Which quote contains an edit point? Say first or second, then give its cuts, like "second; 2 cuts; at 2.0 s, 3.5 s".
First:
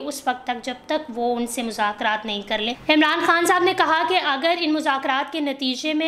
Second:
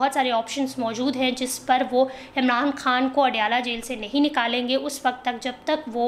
first; 1 cut; at 2.7 s